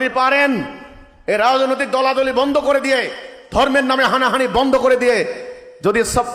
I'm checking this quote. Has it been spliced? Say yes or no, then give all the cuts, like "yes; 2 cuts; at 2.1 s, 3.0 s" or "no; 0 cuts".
no; 0 cuts